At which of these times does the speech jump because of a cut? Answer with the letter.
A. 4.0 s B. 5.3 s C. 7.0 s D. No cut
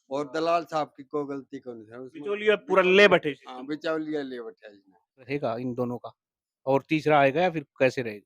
B